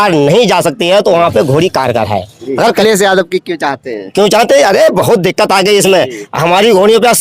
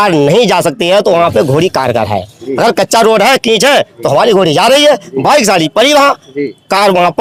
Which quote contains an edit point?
first; 1 cut; at 2.8 s

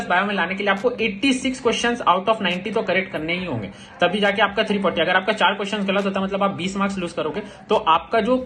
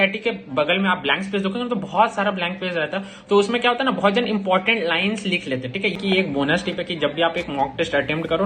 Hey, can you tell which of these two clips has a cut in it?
second; 1 cut; at 6.0 s

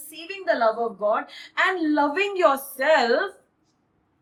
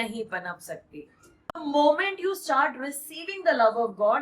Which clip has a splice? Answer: second; 1 cut; at 1.6 s

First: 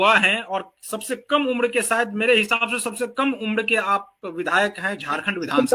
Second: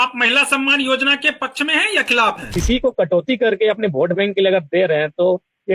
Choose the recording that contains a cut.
second; 1 cut; at 2.5 s

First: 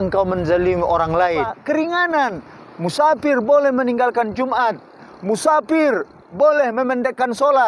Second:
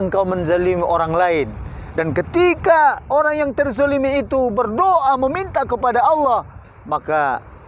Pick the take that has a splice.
first; 1 cut; at 1.5 s

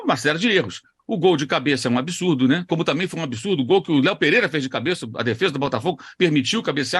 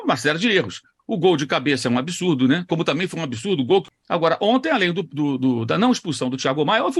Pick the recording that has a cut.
second; 1 cut; at 3.9 s

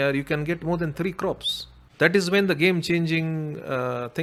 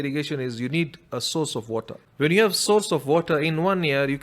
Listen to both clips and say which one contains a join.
second; 1 cut; at 2.0 s

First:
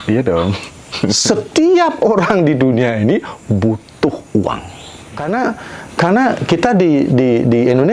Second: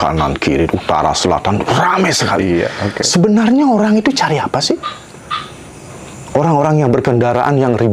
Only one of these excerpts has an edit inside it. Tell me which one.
first; 1 cut; at 5.2 s

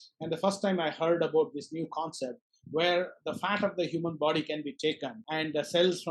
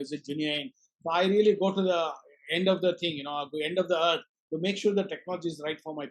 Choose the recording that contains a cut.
first; 1 cut; at 5.2 s

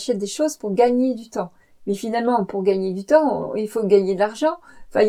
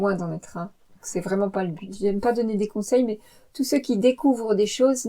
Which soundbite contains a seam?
second; 1 cut; at 1.9 s

